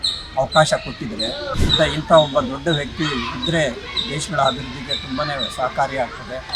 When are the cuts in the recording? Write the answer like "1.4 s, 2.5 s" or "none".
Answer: 1.5 s